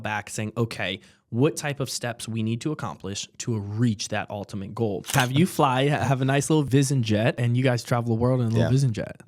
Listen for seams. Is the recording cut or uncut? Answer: cut